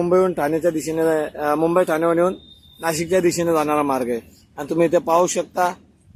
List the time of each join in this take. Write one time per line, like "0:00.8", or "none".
none